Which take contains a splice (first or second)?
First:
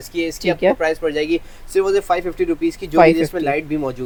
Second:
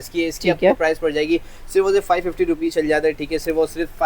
second